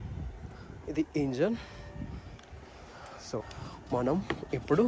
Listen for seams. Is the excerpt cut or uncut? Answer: cut